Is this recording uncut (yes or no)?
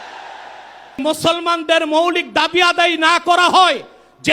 no